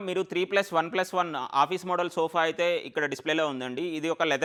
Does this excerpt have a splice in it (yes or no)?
no